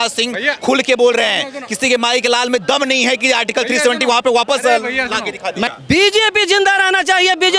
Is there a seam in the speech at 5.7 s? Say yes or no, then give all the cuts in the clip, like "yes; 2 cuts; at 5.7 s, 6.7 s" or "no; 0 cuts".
yes; 1 cut; at 5.7 s